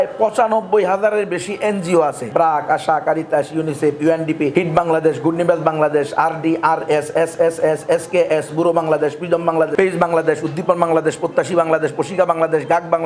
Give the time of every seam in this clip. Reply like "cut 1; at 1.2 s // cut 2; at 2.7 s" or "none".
cut 1; at 2.2 s // cut 2; at 4.5 s // cut 3; at 9.7 s